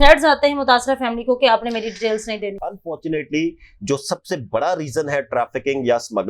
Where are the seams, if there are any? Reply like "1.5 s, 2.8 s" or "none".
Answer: 2.6 s